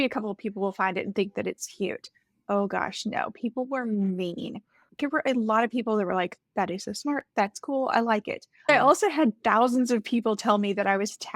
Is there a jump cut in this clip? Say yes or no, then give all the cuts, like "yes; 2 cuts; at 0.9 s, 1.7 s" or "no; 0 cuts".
yes; 2 cuts; at 4.9 s, 8.7 s